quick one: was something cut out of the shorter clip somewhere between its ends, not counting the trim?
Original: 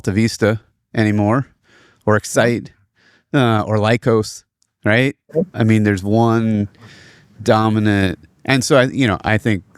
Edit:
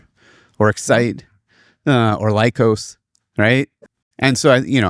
yes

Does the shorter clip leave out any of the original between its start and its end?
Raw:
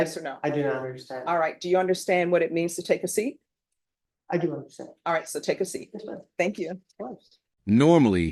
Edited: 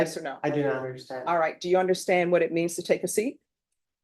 no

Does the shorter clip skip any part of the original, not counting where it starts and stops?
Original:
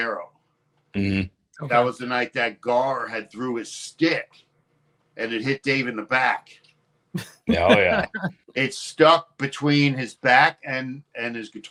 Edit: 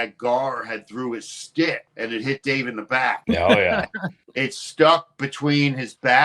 yes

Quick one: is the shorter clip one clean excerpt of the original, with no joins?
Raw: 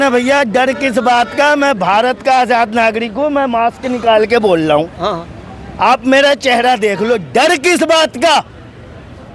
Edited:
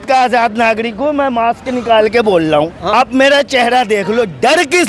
no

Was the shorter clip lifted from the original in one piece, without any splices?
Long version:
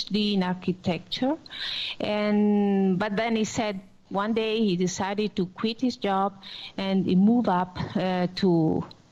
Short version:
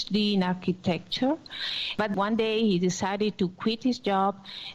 no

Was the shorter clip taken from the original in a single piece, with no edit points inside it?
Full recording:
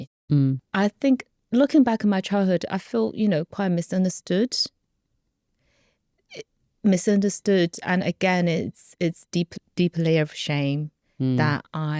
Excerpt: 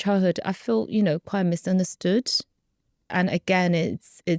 no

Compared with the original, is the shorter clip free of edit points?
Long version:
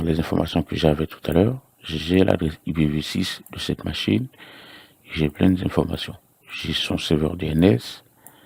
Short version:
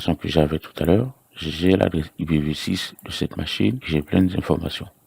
no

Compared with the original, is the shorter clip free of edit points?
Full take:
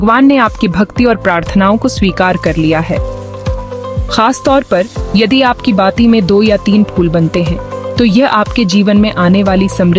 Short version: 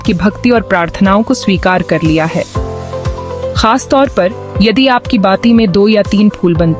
yes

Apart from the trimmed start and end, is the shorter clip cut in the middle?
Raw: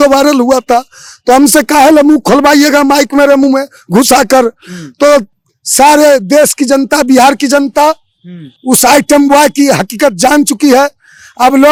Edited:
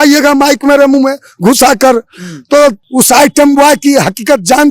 yes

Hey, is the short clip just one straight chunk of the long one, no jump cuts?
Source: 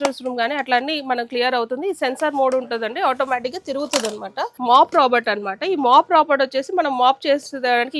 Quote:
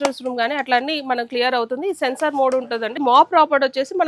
no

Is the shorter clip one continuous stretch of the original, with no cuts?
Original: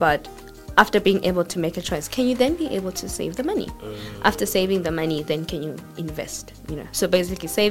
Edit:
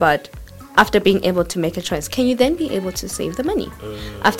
yes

